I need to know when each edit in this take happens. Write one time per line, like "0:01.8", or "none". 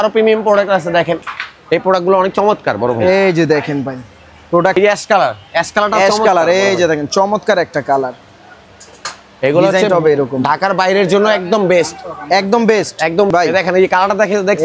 0:04.8
0:13.3